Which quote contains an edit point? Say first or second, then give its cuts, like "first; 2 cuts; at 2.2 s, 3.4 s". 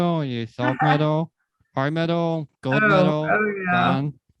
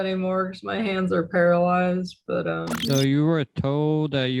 second; 1 cut; at 2.7 s